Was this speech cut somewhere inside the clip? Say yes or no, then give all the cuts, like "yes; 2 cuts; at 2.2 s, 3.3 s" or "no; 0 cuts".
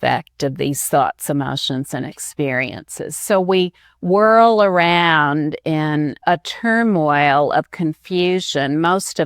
yes; 1 cut; at 6.2 s